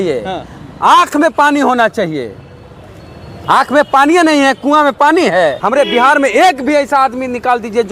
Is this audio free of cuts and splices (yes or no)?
no